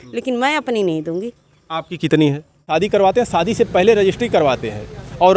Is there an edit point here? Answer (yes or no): yes